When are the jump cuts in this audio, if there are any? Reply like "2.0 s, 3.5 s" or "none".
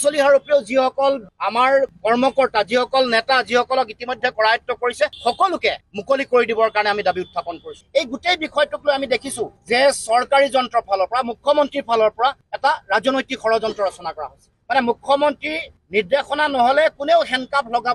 7.8 s